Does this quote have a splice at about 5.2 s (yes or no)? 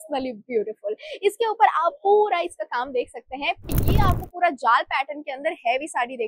no